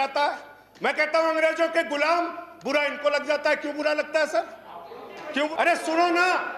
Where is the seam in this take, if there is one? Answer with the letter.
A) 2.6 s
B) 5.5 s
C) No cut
B